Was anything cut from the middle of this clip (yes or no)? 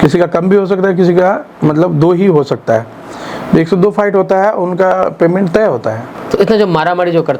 yes